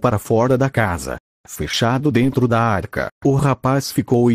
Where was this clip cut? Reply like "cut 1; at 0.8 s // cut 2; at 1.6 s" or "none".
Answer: cut 1; at 1.2 s